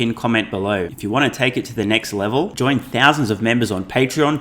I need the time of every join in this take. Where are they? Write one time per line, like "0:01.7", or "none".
0:00.9